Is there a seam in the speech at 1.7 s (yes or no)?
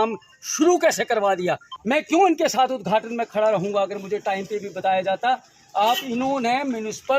yes